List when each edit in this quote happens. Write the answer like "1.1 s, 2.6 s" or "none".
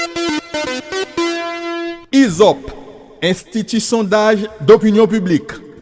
1.8 s

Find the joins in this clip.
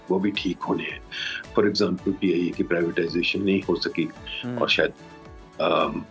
none

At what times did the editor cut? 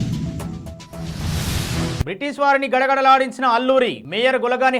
2.0 s

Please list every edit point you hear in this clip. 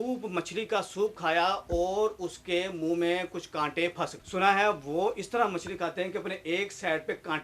4.2 s

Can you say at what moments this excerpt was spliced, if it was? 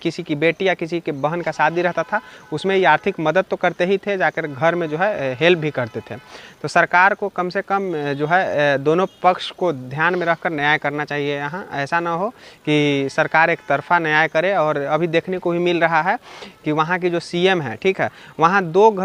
none

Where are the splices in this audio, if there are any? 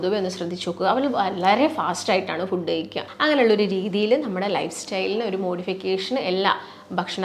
3.0 s

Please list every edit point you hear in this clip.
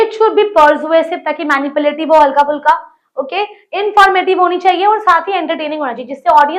none

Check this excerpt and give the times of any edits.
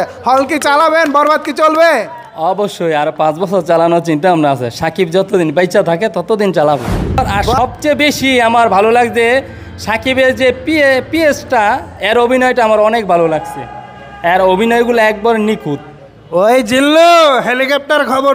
7.4 s

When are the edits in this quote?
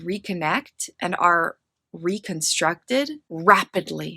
3.2 s

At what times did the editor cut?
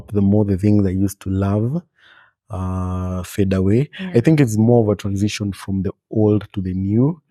none

